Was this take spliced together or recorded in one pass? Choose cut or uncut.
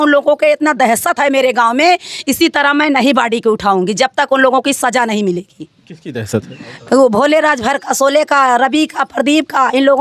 uncut